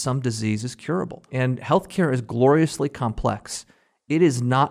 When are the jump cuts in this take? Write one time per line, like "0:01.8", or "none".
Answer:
0:01.2